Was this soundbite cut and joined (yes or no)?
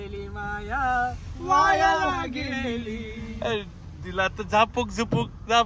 no